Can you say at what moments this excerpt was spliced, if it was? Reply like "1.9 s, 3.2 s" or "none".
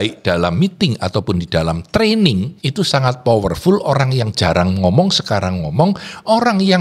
2.6 s